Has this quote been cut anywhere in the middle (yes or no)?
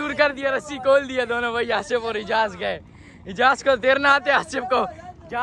no